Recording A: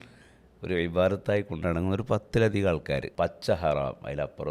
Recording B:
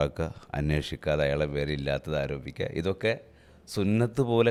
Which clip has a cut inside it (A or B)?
A